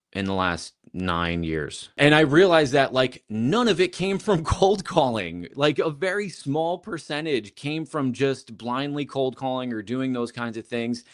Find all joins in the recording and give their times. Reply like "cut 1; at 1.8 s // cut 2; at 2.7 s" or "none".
cut 1; at 2.0 s